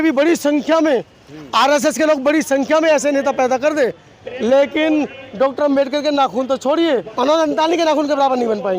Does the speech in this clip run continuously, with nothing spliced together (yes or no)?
no